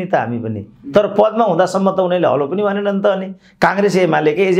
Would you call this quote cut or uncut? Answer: uncut